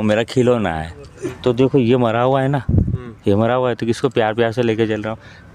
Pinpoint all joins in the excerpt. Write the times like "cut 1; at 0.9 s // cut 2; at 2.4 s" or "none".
cut 1; at 1.3 s